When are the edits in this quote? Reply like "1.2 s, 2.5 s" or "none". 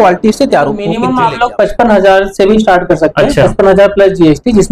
1.0 s